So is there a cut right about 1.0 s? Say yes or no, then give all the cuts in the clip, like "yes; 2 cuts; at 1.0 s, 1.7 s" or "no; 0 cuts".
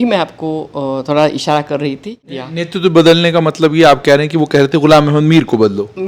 no; 1 cut; at 2.4 s